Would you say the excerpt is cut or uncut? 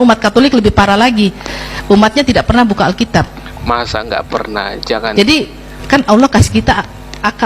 cut